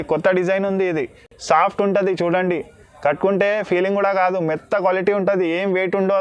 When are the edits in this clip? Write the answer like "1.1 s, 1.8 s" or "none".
none